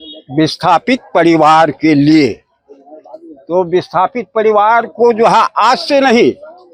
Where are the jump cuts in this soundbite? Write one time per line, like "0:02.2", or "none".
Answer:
none